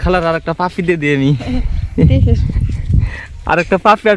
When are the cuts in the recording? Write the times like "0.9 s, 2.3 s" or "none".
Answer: none